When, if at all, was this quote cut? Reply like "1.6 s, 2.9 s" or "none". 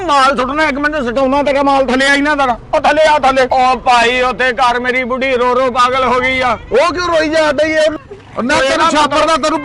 8.0 s

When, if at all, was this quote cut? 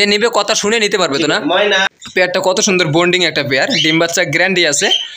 1.8 s

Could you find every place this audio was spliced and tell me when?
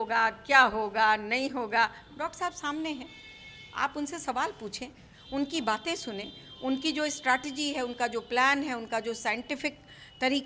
none

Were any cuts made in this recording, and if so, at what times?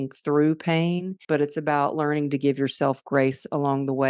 1.1 s

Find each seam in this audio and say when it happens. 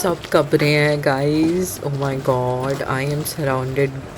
none

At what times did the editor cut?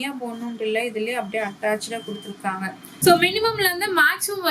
2.9 s

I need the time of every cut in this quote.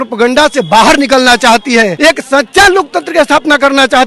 1.9 s

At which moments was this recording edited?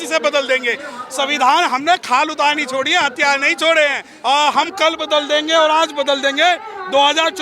4.1 s

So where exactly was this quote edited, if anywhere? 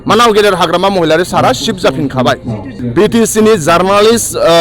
2.7 s

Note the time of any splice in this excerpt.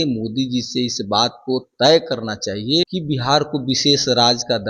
2.9 s

